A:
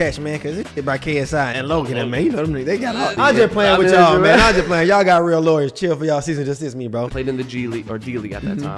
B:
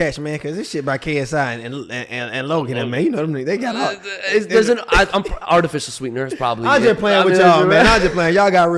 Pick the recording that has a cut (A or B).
A